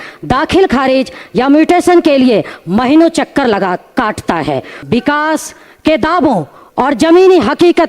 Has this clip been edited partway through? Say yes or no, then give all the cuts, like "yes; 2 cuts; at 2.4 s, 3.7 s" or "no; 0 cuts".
yes; 1 cut; at 4.7 s